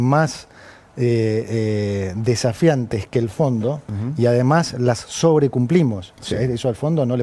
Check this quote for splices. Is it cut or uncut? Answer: uncut